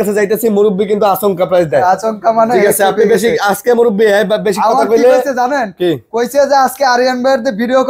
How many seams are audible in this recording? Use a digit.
0